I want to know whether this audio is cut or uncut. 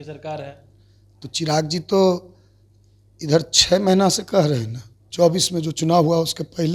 cut